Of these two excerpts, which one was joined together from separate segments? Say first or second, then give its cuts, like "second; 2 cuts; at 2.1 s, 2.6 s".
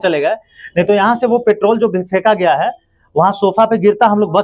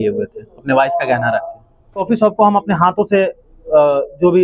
second; 1 cut; at 2.0 s